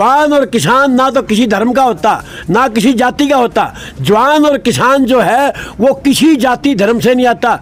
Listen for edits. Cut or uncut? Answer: uncut